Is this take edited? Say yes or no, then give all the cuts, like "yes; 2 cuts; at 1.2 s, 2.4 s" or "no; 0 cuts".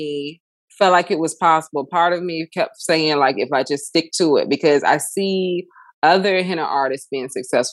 no; 0 cuts